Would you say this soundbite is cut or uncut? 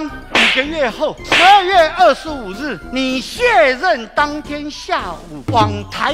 uncut